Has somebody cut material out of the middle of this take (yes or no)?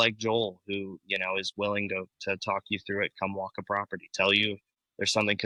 no